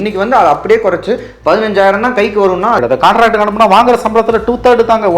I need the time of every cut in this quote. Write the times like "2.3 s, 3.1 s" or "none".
2.8 s